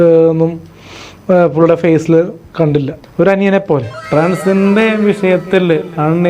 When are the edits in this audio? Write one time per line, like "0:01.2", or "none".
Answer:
0:03.0
0:03.9